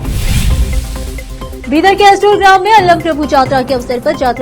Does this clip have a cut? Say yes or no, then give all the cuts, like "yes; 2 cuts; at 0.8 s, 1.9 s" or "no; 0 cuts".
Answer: no; 0 cuts